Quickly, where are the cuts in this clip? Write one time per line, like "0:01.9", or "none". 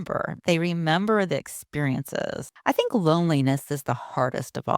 0:02.5